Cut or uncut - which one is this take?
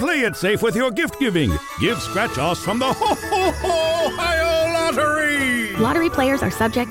uncut